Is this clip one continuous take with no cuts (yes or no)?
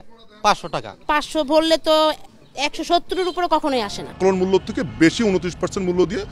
no